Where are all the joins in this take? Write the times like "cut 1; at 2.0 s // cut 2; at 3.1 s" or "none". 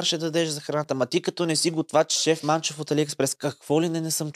cut 1; at 2.2 s